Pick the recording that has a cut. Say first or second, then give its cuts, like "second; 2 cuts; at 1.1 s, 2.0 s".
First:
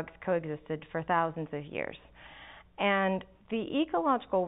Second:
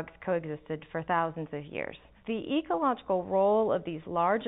second; 1 cut; at 2.1 s